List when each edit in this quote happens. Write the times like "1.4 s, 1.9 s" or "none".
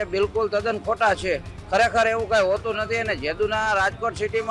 1.5 s